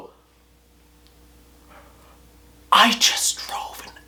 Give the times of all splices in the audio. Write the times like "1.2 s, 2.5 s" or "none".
none